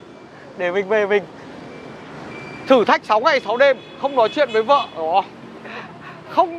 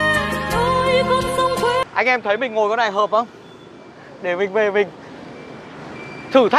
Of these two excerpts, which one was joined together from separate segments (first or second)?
second